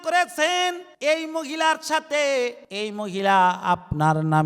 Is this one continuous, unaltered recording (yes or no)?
no